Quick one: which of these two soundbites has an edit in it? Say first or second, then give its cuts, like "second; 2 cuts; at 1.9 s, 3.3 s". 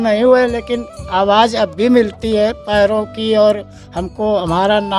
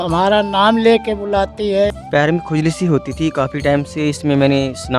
second; 1 cut; at 2.0 s